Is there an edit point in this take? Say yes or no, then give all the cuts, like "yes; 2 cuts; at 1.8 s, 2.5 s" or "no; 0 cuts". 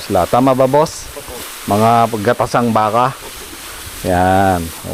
no; 0 cuts